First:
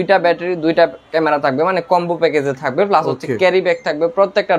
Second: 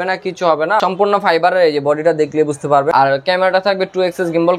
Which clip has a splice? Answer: second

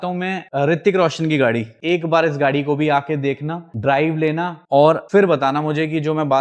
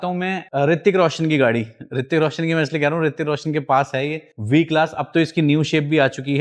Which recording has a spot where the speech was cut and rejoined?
first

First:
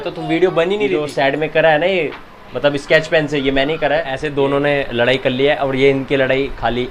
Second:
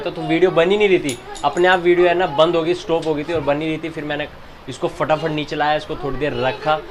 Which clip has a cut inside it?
first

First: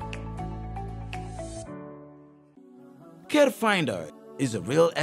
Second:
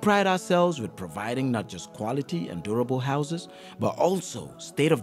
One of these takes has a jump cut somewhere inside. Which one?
first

